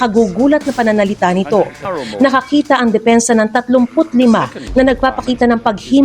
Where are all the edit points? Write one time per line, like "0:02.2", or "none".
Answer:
0:02.0